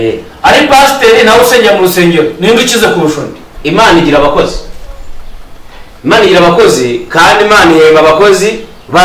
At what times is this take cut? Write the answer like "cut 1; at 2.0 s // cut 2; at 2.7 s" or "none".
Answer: cut 1; at 3.5 s